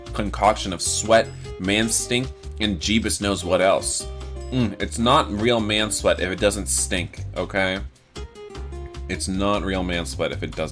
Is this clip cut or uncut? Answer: uncut